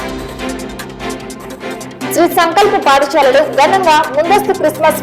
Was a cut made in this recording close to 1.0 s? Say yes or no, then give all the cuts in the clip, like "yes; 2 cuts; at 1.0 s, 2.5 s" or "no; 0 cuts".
yes; 2 cuts; at 1.0 s, 2.1 s